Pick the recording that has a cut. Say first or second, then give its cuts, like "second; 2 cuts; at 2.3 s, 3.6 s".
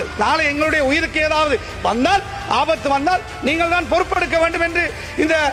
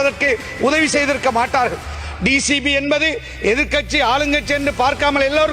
second; 1 cut; at 1.9 s